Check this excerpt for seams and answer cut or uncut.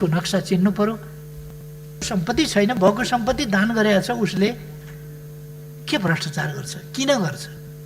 cut